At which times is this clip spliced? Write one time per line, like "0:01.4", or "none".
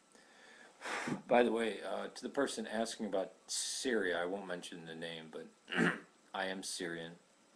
0:02.1

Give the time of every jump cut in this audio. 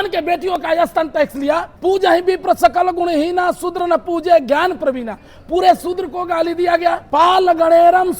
0:01.7
0:07.0

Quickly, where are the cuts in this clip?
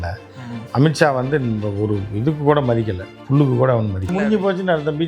0:04.1

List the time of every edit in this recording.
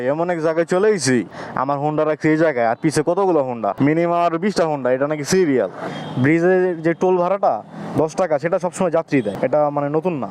0:01.4
0:03.7
0:05.9
0:09.3

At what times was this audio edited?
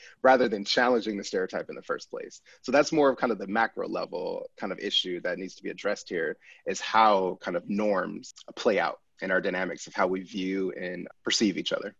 0:08.3
0:11.1

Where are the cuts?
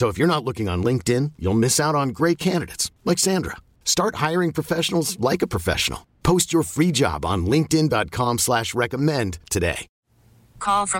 0:09.9

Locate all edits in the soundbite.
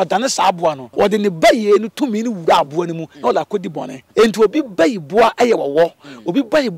0:00.8
0:03.9

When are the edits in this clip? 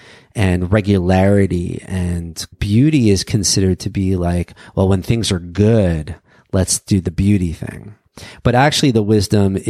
0:02.6

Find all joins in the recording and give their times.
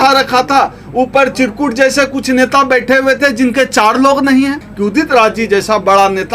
0:04.7

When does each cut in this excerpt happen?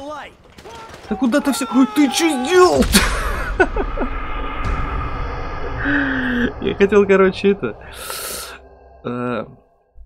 none

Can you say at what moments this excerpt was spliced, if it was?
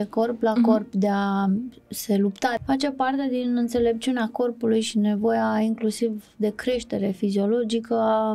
0:02.6

